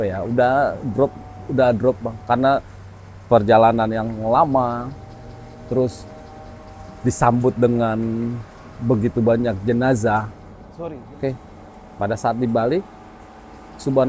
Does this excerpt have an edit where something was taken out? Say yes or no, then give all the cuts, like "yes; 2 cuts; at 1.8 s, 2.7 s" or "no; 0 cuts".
yes; 1 cut; at 10.6 s